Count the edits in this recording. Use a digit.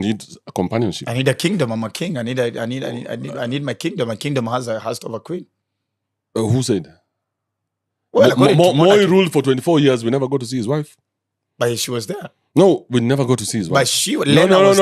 0